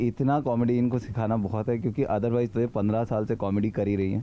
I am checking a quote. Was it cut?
no; 0 cuts

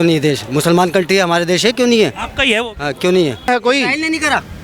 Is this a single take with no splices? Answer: no; 1 cut; at 3.5 s

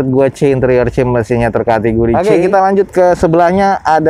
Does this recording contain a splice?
yes; 1 cut; at 2.1 s

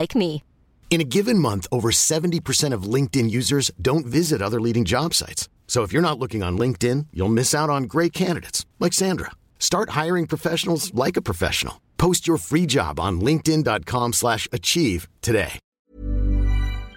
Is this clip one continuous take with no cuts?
no; 1 cut; at 15.6 s

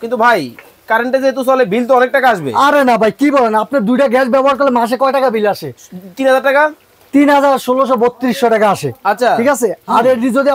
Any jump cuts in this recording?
no; 0 cuts

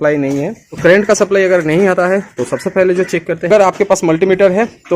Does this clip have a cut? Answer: yes; 1 cut; at 3.5 s

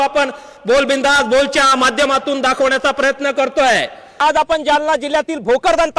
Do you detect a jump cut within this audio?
yes; 1 cut; at 4.2 s

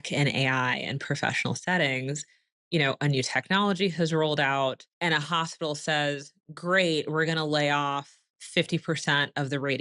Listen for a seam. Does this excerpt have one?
yes; 1 cut; at 4.9 s

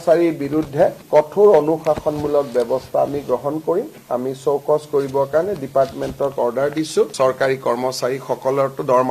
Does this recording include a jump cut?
no; 0 cuts

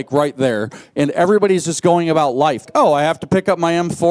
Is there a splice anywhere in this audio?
yes; 1 cut; at 2.7 s

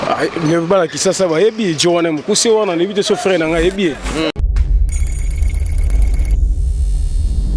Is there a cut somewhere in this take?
yes; 1 cut; at 4.4 s

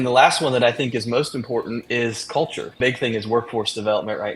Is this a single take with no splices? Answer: no; 2 cuts; at 1.8 s, 2.7 s

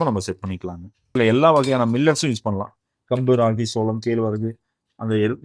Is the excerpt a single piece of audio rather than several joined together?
no; 1 cut; at 1.1 s

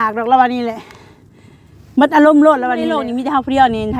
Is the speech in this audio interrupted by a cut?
yes; 1 cut; at 3.1 s

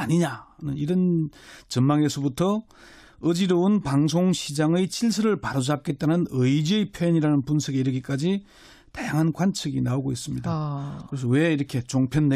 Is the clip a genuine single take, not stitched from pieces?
no; 1 cut; at 10.3 s

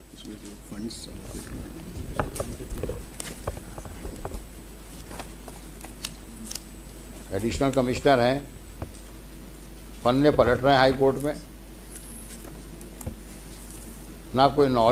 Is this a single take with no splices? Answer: yes; 0 cuts

